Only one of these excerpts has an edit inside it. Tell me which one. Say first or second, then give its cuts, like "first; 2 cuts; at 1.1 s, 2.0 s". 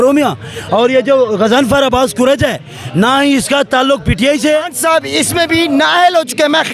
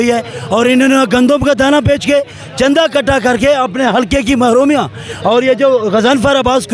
first; 1 cut; at 4.7 s